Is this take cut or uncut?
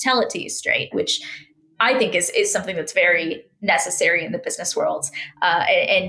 cut